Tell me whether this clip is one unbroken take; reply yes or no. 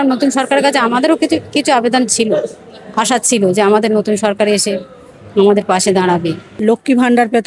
no